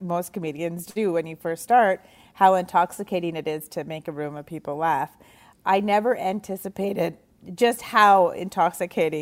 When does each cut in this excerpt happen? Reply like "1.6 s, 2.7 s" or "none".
7.3 s

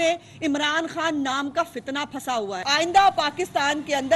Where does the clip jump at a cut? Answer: 2.6 s

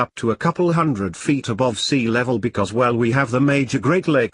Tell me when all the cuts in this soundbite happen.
2.2 s

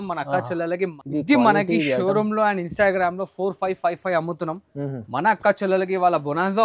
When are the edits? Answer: 0.9 s

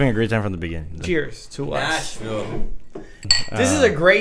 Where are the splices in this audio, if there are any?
1.0 s, 3.3 s

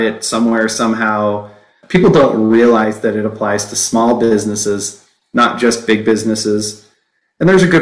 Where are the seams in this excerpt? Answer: 1.7 s

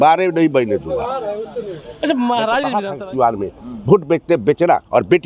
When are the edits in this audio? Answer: 2.8 s

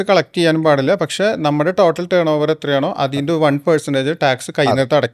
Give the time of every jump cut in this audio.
none

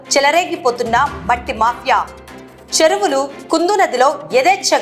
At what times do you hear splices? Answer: none

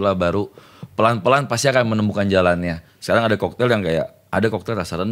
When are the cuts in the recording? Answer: 2.8 s

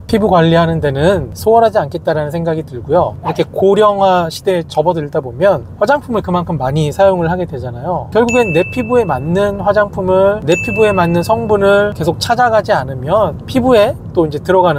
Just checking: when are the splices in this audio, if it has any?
1.3 s, 3.1 s

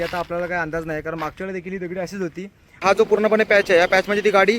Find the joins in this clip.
2.8 s

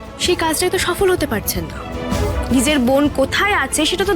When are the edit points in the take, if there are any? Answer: 2.4 s

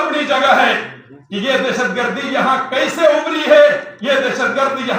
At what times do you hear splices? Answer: none

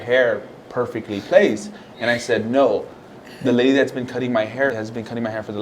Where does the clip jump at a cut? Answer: 4.7 s

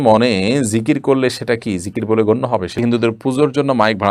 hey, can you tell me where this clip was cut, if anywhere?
2.7 s

